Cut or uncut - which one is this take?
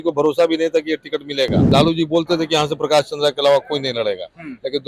cut